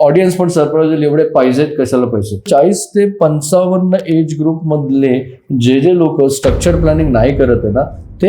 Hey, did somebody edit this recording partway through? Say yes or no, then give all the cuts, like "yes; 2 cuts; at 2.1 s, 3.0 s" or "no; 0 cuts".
yes; 1 cut; at 2.5 s